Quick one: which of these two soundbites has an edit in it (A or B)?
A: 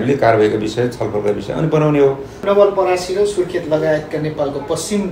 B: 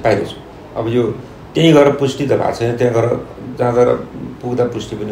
A